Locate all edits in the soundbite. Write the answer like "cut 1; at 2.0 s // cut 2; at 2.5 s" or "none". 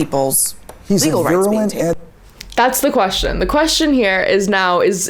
none